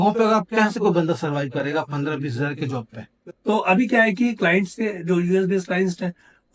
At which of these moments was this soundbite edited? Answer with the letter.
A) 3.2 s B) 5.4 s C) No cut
A